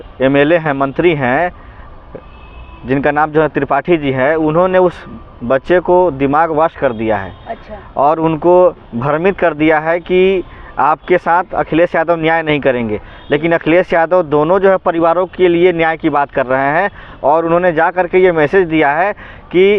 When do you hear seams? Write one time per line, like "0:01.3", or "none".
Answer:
none